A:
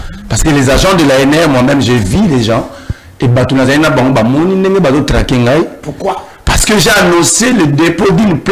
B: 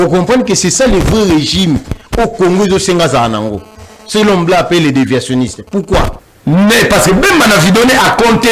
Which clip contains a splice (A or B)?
B